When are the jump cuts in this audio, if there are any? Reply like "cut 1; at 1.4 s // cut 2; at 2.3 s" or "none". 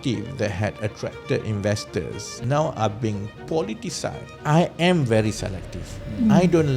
cut 1; at 2.2 s // cut 2; at 4.3 s